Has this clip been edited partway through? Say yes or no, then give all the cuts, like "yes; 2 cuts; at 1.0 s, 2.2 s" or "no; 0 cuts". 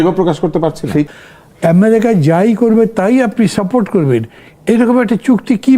yes; 1 cut; at 1.1 s